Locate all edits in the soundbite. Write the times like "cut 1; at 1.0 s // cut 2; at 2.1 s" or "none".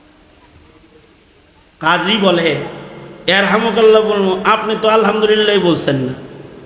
none